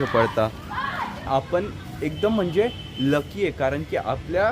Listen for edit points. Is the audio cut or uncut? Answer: cut